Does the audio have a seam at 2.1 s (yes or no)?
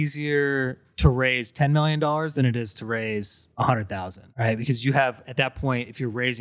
no